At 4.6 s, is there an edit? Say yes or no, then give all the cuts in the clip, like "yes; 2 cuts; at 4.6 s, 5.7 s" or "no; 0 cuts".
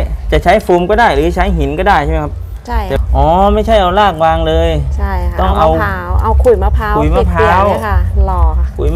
no; 1 cut; at 3.0 s